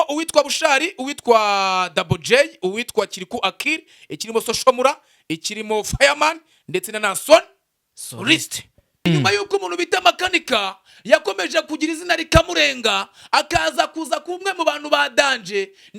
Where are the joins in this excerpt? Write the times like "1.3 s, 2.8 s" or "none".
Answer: 9.1 s